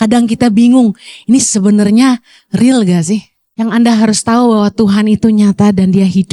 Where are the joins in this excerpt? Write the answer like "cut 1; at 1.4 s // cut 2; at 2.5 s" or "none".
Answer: cut 1; at 3.4 s